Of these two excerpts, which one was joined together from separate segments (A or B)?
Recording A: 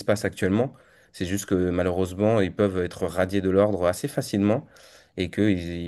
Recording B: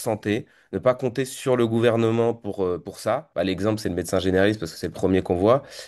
B